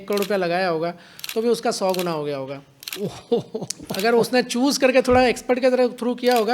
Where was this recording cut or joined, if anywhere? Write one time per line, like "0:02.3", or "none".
0:01.1